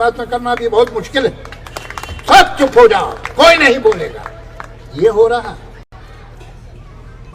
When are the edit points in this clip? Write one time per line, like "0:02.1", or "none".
none